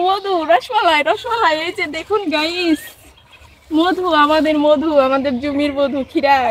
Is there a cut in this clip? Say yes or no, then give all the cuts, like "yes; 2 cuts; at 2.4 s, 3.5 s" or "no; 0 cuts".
no; 0 cuts